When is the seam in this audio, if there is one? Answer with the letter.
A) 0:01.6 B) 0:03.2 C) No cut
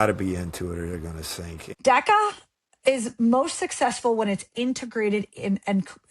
A